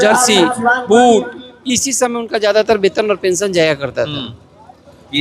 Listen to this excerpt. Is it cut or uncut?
uncut